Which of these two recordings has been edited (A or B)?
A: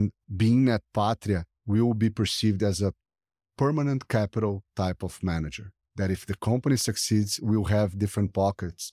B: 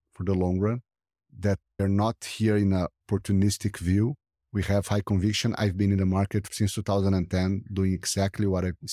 B